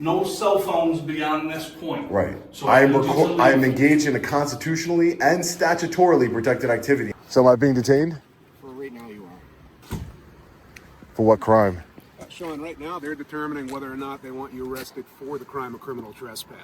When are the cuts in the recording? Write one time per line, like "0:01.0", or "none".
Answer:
0:07.1

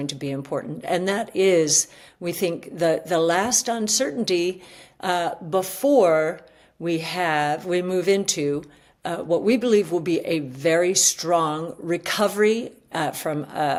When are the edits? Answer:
none

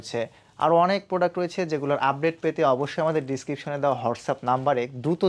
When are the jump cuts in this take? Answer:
none

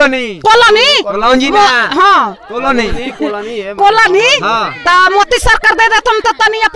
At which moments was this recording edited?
none

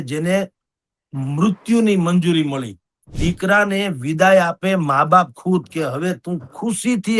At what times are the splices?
0:03.1

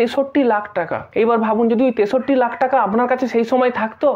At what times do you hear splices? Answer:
0:01.0

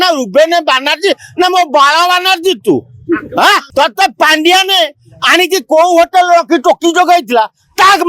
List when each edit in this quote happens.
0:03.7

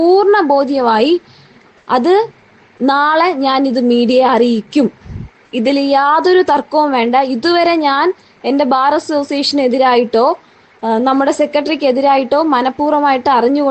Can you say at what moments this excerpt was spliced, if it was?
none

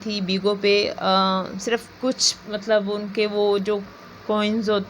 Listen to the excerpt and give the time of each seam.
none

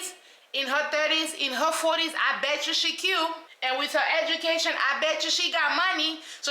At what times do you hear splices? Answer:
0:03.5

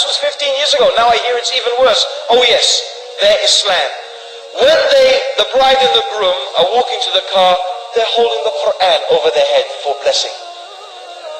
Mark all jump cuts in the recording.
0:03.2

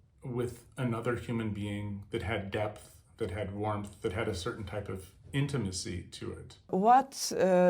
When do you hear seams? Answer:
0:06.7

